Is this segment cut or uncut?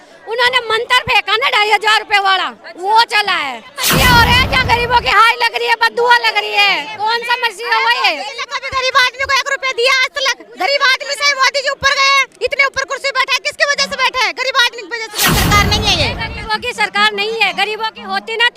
cut